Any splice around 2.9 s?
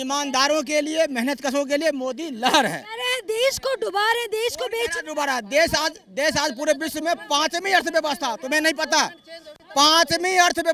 no; 0 cuts

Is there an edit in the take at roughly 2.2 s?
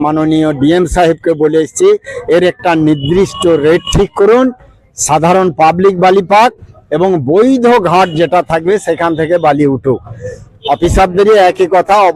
no; 0 cuts

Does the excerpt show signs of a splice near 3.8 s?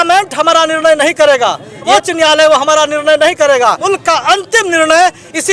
yes; 2 cuts; at 1.8 s, 3.8 s

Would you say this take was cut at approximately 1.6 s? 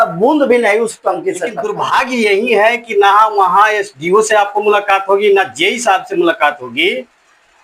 yes; 1 cut; at 1.6 s

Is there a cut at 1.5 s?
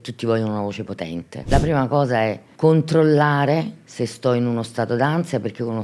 yes; 2 cuts; at 1.5 s, 2.5 s

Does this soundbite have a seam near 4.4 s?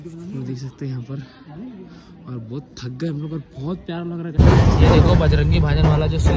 yes; 1 cut; at 4.4 s

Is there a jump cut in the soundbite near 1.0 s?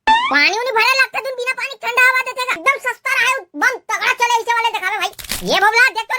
no; 1 cut; at 2.6 s

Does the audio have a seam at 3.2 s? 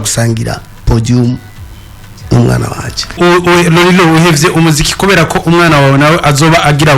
yes; 1 cut; at 3.2 s

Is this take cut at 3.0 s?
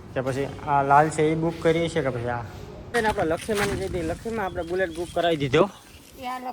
yes; 1 cut; at 3.0 s

